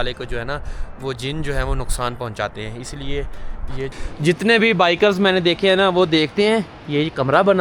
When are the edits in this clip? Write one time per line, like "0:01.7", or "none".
0:03.9